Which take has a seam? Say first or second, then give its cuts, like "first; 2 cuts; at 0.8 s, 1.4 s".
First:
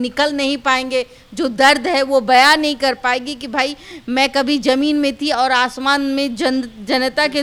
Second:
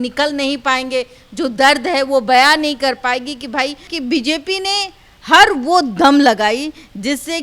second; 1 cut; at 3.9 s